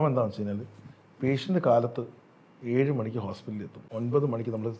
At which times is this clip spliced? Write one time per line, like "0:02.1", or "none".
0:03.8